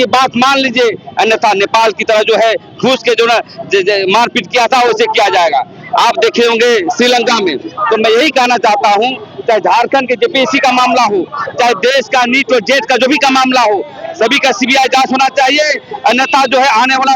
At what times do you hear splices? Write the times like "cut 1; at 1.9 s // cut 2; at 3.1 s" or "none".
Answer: none